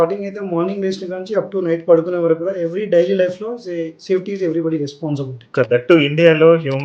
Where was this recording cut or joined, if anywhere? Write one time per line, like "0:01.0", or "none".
0:05.7